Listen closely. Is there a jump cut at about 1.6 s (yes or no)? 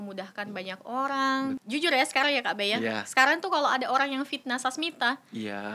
yes